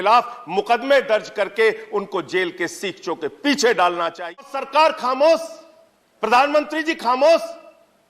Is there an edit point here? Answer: yes; 1 cut; at 4.4 s

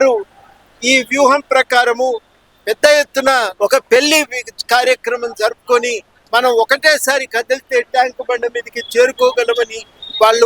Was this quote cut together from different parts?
yes; 1 cut; at 3.5 s

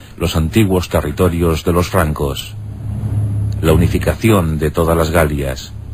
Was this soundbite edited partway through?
no; 0 cuts

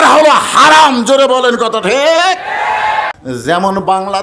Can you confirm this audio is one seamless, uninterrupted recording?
no; 1 cut; at 3.2 s

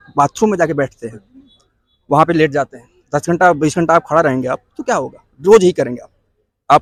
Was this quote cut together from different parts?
no; 0 cuts

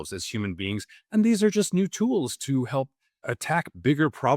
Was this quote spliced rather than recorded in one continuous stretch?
yes; 1 cut; at 3.3 s

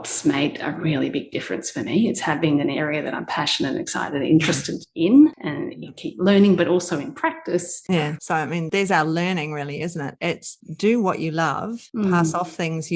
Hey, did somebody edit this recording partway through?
yes; 1 cut; at 7.8 s

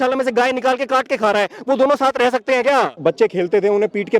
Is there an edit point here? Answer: yes; 1 cut; at 2.9 s

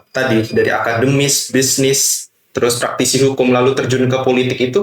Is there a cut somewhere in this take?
no; 0 cuts

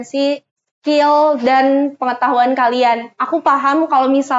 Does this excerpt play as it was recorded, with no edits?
yes; 0 cuts

